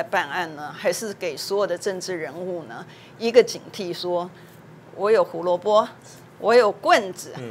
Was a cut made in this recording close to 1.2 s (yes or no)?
no